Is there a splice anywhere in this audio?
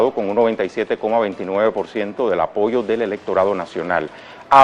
yes; 1 cut; at 2.6 s

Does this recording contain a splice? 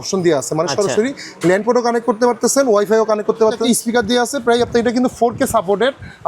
yes; 1 cut; at 3.6 s

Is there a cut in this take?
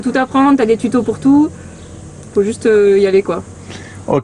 no; 0 cuts

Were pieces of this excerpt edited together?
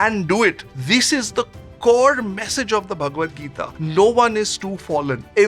no; 0 cuts

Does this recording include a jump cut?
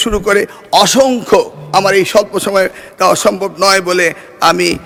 no; 0 cuts

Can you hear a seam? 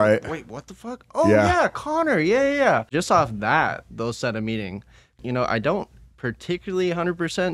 yes; 2 cuts; at 2.9 s, 5.2 s

